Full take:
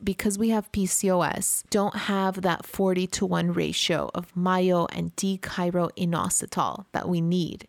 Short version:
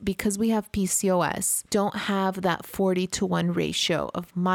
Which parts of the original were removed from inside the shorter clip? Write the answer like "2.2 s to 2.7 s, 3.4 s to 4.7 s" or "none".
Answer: none

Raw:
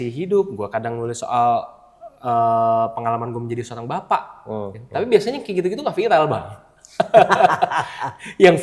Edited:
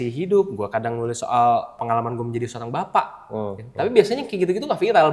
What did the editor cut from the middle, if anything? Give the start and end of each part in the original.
1.8 s to 3.0 s

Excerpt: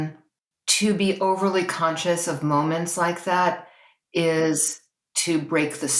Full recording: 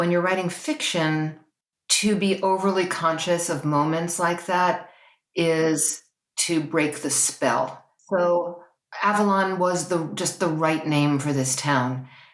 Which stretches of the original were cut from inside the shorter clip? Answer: none

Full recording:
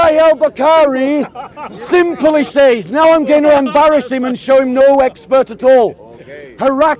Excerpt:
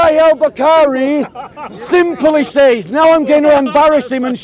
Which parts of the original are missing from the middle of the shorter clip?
none

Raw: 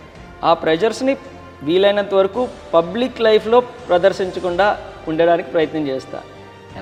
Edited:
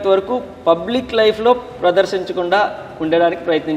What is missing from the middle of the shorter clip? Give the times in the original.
none

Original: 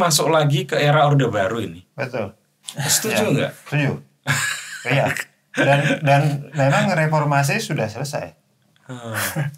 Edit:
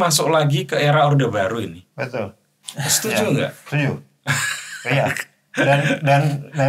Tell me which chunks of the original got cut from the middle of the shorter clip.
none

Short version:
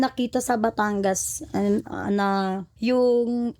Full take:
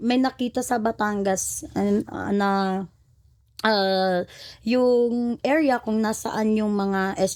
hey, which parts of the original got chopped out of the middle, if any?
2.9 s to 4.5 s

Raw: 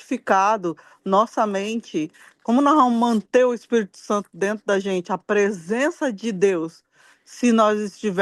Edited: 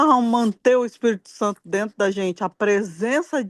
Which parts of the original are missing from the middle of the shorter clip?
none

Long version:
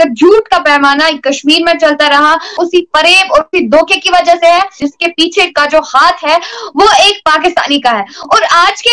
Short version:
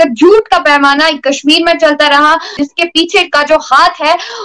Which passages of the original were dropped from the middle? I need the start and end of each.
2.5 s to 4.7 s

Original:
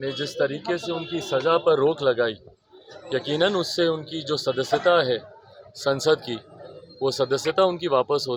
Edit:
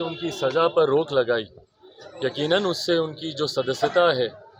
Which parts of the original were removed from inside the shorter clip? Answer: none

